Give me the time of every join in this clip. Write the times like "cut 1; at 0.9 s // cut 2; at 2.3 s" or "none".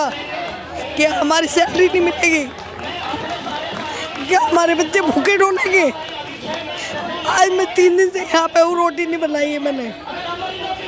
none